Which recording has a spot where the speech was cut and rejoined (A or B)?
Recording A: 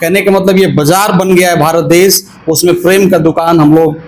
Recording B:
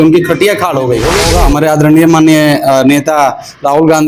B